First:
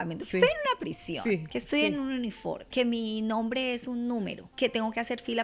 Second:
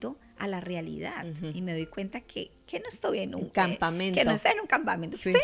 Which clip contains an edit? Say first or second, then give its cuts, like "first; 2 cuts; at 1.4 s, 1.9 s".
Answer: first; 2 cuts; at 2.6 s, 4.4 s